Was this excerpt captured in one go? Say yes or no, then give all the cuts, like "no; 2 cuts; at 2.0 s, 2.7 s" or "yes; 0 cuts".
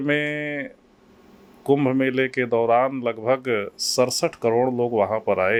yes; 0 cuts